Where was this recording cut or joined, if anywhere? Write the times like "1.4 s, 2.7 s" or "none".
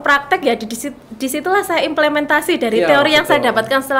none